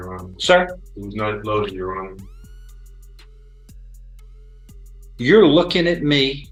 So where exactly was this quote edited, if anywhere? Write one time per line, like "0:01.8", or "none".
none

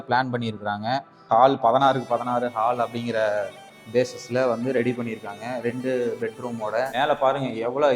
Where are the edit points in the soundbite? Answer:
0:01.1
0:06.9

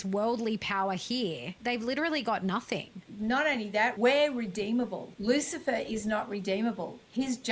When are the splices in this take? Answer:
0:01.5
0:03.0
0:04.0
0:05.1

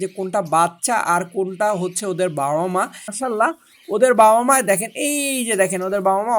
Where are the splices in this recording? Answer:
0:03.2

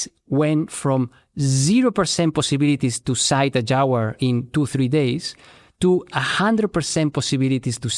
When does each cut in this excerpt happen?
none

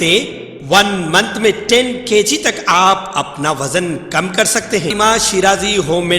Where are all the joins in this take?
0:04.9

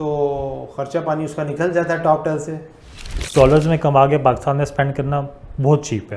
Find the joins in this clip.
0:03.2

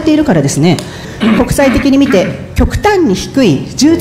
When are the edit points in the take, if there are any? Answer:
0:01.1

